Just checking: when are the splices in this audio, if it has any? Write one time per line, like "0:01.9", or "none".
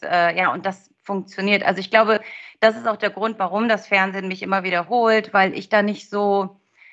none